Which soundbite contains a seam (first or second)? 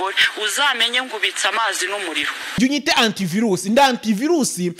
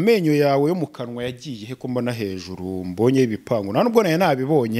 first